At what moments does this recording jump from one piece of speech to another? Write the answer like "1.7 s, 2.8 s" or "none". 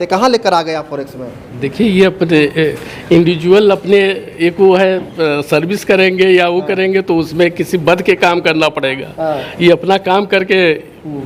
none